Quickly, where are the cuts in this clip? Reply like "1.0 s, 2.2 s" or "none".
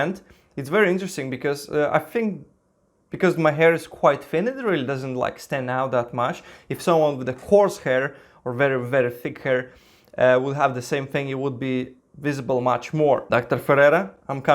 13.2 s